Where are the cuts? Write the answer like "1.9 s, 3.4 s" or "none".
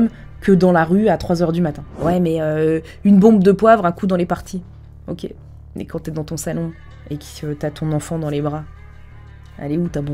1.9 s